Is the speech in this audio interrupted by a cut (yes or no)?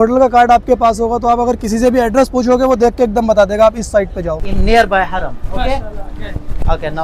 yes